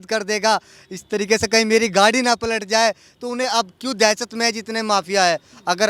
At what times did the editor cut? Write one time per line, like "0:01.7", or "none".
none